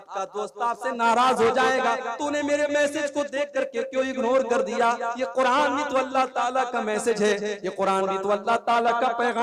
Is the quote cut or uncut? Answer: uncut